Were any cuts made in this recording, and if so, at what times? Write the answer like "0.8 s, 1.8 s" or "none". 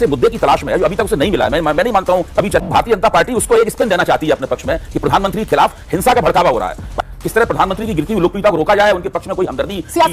2.6 s, 7.1 s